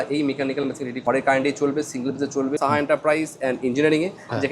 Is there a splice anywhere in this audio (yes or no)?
yes